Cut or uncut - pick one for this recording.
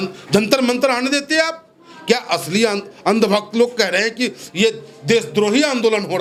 uncut